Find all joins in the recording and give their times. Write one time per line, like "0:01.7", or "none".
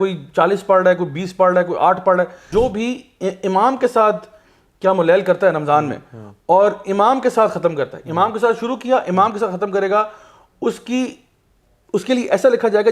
0:02.5